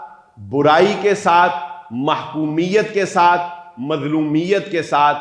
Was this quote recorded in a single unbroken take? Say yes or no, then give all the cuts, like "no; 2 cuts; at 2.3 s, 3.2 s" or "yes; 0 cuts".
yes; 0 cuts